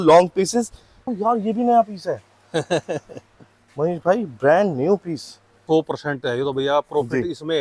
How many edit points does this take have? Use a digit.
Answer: 2